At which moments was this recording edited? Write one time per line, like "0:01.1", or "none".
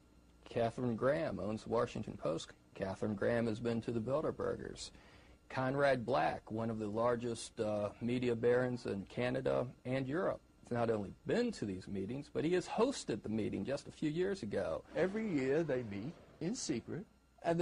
none